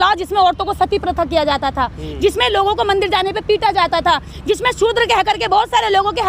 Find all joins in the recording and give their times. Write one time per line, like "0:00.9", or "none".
none